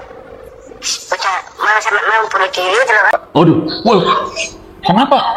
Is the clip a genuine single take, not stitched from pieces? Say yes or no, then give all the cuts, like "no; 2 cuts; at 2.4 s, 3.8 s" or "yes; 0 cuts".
yes; 0 cuts